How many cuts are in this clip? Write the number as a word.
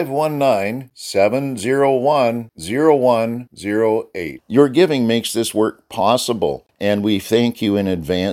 one